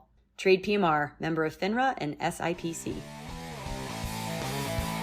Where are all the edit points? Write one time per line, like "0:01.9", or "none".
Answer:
0:03.1